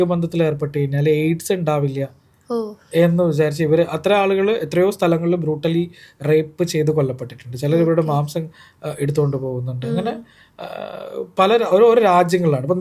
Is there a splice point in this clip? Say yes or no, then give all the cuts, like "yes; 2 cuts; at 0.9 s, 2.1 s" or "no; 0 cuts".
no; 0 cuts